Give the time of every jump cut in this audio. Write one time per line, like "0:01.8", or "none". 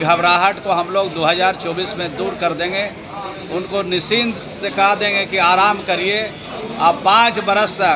none